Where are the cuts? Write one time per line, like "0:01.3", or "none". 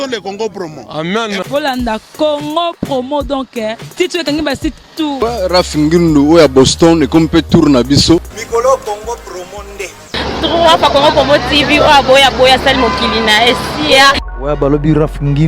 0:05.2
0:08.4
0:14.2

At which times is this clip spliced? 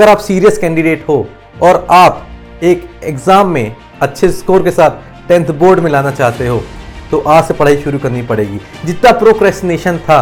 none

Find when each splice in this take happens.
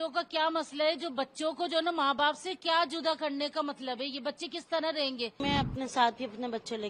0:05.4

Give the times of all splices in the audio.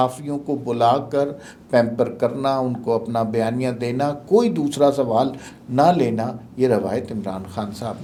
none

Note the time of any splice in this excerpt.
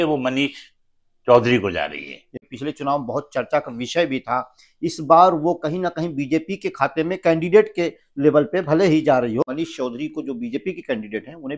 0:02.3
0:09.5

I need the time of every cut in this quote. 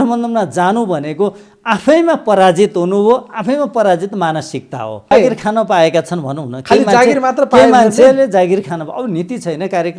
0:05.1

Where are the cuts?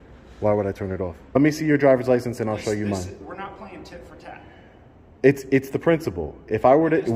0:01.4

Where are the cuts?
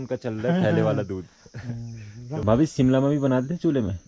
0:02.4

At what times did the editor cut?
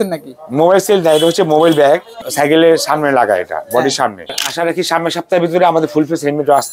0:02.2
0:04.4

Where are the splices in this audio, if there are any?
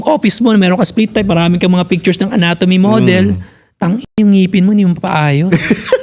none

